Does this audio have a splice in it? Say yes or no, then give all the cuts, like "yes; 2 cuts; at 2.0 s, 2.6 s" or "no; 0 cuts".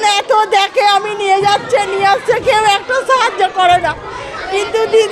no; 0 cuts